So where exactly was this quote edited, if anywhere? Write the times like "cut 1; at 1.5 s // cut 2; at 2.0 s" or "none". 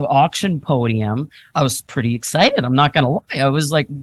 cut 1; at 1.4 s